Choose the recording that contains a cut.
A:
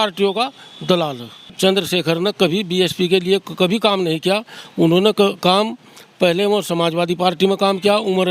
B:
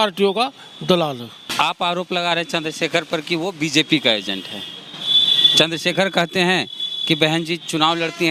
A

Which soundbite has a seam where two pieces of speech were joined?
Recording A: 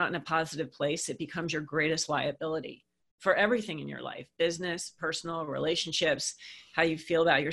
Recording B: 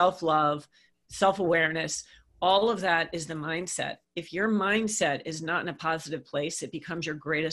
B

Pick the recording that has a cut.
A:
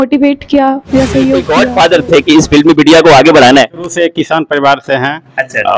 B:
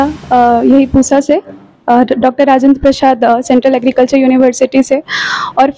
A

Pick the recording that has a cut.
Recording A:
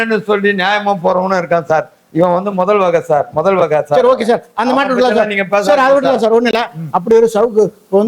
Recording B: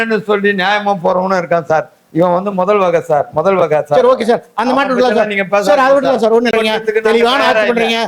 B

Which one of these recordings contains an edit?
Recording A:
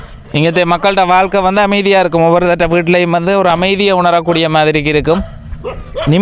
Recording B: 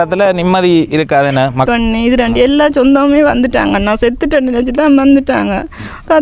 B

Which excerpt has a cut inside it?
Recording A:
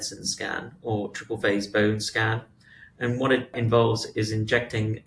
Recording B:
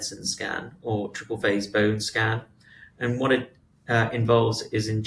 A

